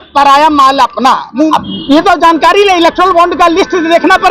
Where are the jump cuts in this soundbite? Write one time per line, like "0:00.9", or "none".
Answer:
0:01.5